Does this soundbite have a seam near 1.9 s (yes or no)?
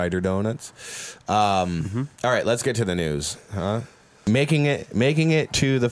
no